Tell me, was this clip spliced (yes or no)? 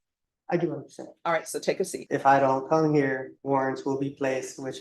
yes